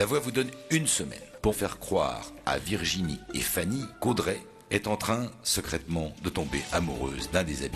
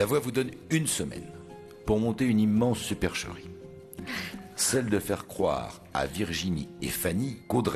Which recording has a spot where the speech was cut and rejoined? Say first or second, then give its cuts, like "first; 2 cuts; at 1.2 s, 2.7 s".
first; 2 cuts; at 1.6 s, 4.5 s